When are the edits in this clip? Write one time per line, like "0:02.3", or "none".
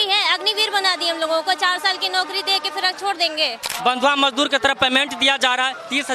0:03.7